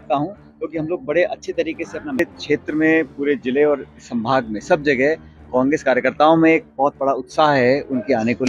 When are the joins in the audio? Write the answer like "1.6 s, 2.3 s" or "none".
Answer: 2.2 s